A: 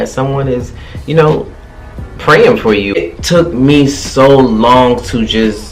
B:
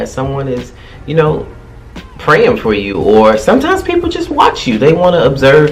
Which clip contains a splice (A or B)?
A